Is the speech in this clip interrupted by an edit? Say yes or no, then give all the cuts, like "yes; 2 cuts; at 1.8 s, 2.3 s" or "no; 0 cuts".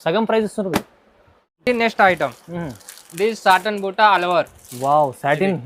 no; 0 cuts